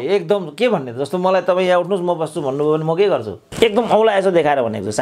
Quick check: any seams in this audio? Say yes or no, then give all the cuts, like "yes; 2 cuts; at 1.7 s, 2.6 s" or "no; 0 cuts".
yes; 1 cut; at 3.4 s